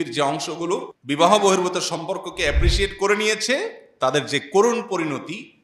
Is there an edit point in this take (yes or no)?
yes